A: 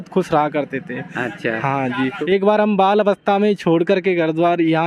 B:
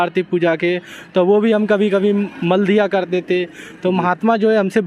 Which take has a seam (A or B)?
A